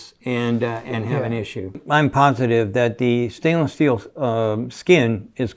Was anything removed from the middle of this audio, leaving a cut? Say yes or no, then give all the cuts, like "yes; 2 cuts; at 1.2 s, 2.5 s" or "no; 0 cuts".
yes; 1 cut; at 1.8 s